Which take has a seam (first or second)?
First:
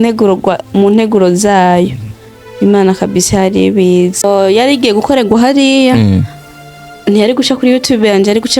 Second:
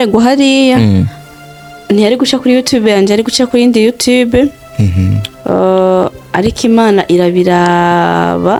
first